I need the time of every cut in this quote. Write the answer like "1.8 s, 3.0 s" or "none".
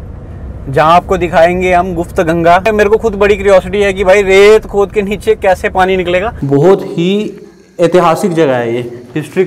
2.7 s, 6.4 s